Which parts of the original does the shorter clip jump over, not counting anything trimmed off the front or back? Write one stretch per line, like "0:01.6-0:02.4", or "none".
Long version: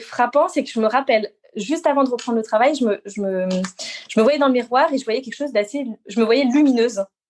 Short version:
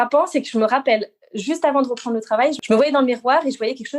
0:02.8-0:04.0